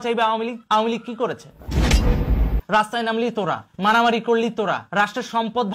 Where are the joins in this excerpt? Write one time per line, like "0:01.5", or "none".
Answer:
0:03.7
0:04.8